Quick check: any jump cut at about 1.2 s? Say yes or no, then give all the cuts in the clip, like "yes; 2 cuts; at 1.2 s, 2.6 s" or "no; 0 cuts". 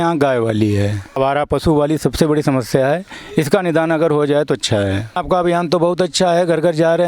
yes; 2 cuts; at 1.2 s, 5.2 s